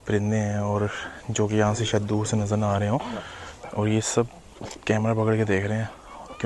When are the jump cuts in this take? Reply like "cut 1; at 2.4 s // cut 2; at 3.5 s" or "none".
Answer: none

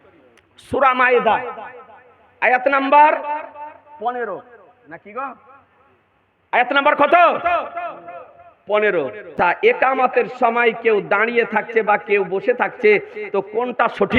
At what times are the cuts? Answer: cut 1; at 9.3 s

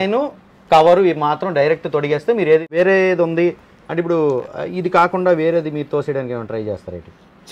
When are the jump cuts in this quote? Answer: cut 1; at 2.7 s

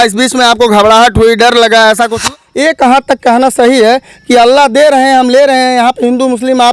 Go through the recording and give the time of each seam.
cut 1; at 2.3 s

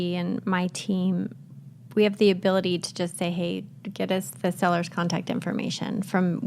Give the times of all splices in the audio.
none

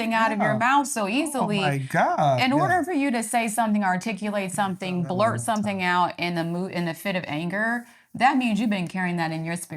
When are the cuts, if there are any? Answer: none

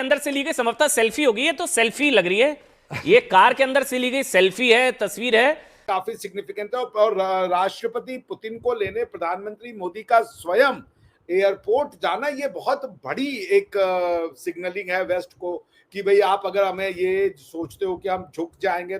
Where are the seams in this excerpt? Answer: cut 1; at 5.8 s

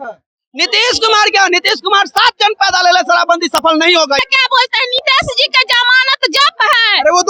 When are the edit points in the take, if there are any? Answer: cut 1; at 4.2 s

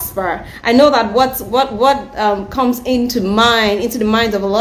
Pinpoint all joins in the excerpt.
none

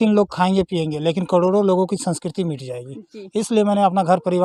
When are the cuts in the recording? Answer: none

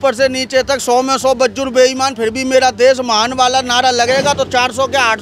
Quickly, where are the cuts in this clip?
none

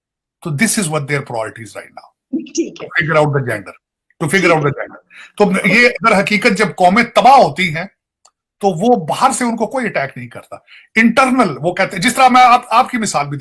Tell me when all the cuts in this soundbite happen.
none

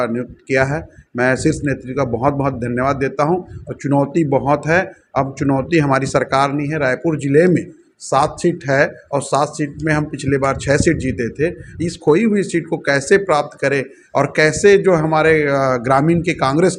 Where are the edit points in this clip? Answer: none

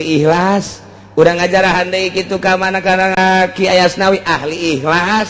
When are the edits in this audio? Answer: cut 1; at 3.2 s

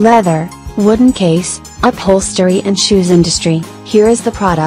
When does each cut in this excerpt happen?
cut 1; at 3.7 s

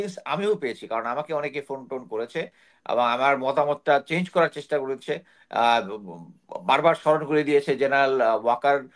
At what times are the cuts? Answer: none

